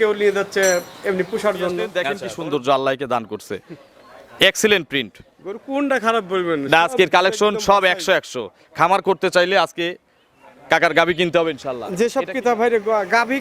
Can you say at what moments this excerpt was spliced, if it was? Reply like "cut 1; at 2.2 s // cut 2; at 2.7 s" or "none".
cut 1; at 1.9 s // cut 2; at 11.9 s